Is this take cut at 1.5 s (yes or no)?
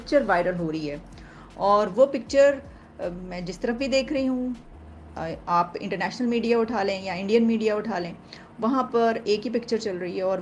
no